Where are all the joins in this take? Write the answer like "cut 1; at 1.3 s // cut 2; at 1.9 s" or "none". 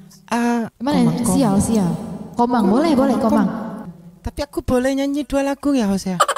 cut 1; at 3.7 s